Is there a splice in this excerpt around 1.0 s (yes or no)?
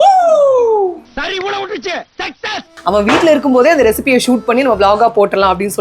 no